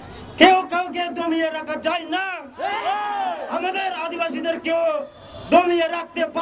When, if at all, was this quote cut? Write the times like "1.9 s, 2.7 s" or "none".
none

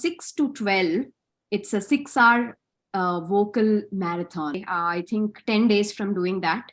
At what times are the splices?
4.6 s

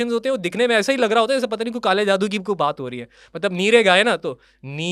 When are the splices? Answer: none

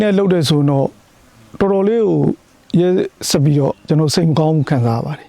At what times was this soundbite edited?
none

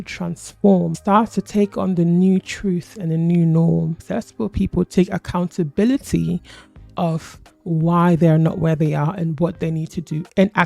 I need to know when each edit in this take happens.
0.9 s, 4.0 s

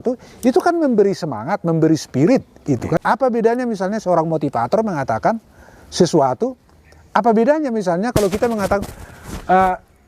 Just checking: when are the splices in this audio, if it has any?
3.0 s

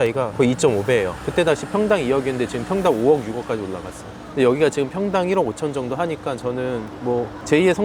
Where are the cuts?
none

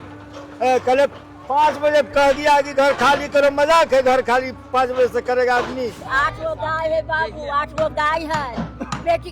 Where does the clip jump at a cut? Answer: 6.0 s

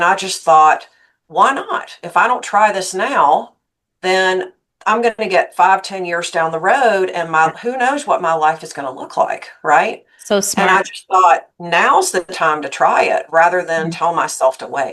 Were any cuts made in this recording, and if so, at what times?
none

